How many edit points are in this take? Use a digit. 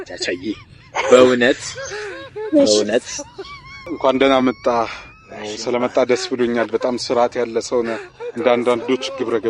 1